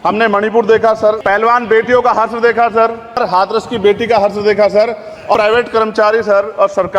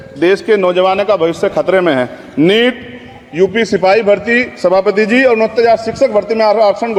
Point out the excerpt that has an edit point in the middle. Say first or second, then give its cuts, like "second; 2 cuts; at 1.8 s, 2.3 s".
first; 3 cuts; at 1.2 s, 3.2 s, 5.3 s